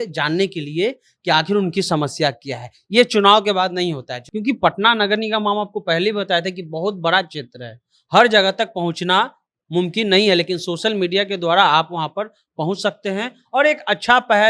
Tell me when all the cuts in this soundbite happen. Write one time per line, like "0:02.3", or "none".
0:04.2